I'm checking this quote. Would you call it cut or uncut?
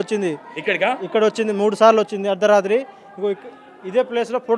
uncut